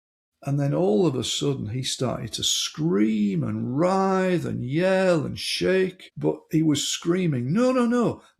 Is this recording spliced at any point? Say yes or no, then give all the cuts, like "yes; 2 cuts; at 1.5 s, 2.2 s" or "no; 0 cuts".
yes; 1 cut; at 6.0 s